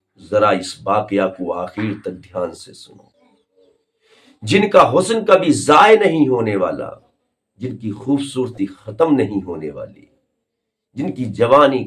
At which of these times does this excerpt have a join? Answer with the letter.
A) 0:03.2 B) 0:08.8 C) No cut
A